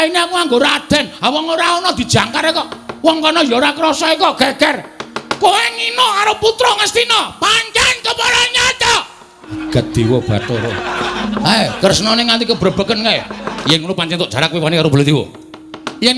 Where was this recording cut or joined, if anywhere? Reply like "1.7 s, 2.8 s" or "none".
9.5 s, 11.2 s, 13.6 s